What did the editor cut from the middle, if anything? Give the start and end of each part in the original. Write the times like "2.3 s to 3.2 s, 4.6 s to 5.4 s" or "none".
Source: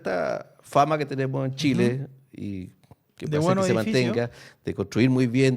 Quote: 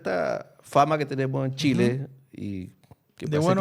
none

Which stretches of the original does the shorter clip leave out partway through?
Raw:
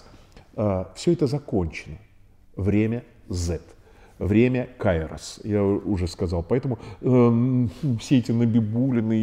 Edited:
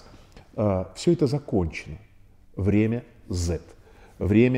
none

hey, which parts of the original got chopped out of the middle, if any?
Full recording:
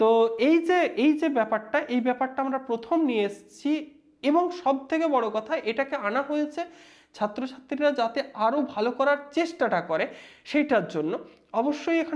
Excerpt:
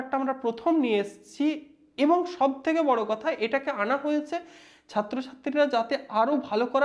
none

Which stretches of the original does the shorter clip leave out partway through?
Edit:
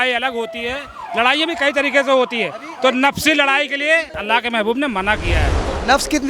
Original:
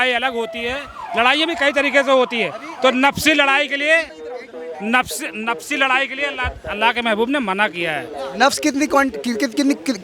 4.1 s to 6.7 s

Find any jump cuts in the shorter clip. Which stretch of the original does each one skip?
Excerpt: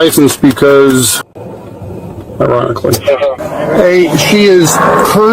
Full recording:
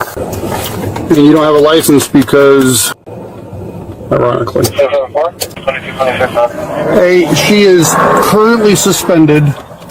5.1 s to 6.6 s

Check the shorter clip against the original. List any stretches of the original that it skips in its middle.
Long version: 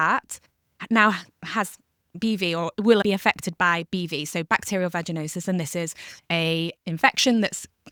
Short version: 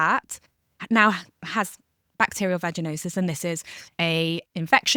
2.1 s to 4.4 s

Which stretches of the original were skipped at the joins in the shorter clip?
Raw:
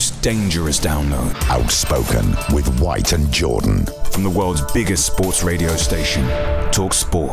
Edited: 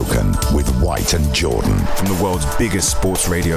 3.9 s to 4.1 s

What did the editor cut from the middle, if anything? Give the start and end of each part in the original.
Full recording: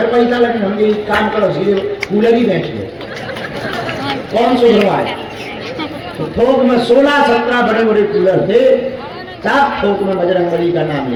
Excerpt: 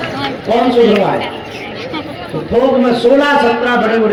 none

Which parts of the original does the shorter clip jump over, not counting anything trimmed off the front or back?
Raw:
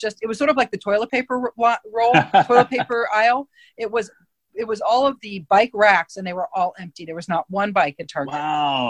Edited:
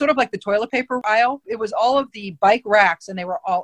1.4 s to 4.1 s

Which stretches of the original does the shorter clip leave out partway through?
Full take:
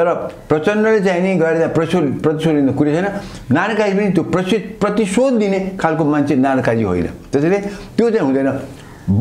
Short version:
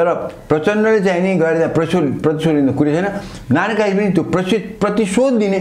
none

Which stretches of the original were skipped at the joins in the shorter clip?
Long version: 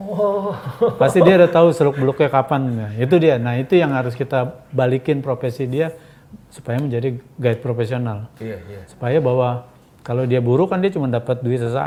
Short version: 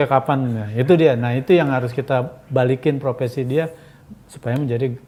none

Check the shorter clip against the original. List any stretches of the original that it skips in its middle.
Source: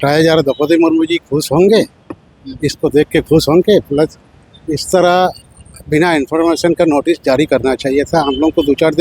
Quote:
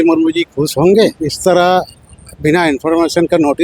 2.0 s to 4.7 s

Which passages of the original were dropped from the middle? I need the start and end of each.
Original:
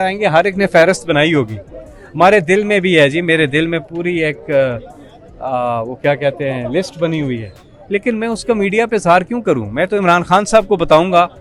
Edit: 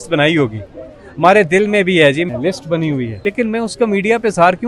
3.2 s to 6.6 s, 7.5 s to 7.8 s

